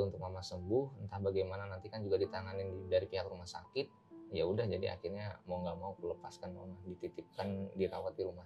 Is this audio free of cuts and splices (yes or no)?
yes